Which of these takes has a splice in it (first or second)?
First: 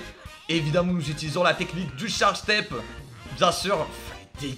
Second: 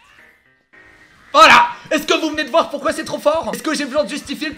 second